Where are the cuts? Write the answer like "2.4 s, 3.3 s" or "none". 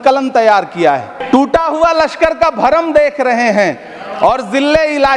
1.1 s